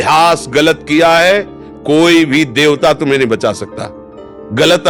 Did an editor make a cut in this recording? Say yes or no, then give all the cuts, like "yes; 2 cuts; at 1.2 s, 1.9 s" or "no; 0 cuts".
no; 0 cuts